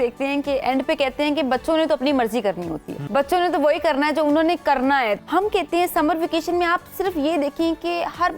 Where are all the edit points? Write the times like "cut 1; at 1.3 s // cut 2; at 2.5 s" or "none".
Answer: cut 1; at 3.0 s // cut 2; at 5.2 s